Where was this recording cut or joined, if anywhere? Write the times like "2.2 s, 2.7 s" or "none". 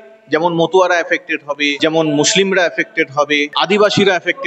1.7 s, 3.5 s